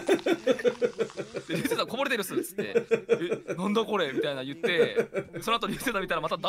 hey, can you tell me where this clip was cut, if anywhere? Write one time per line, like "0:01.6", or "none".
none